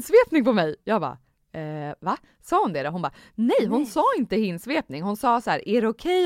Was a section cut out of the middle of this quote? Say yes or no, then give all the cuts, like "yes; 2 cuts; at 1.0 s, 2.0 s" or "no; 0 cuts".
no; 0 cuts